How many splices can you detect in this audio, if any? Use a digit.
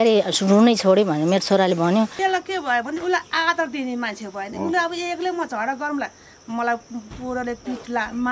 1